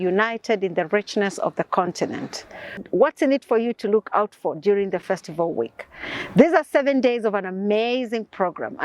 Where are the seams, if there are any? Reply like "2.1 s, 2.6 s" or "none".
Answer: 2.8 s